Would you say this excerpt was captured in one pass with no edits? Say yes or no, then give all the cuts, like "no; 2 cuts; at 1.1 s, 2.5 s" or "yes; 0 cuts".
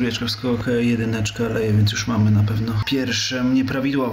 no; 1 cut; at 2.8 s